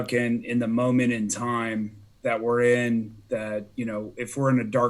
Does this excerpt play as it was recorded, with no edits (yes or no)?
no